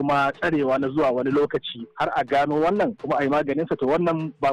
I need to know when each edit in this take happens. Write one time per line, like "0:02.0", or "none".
none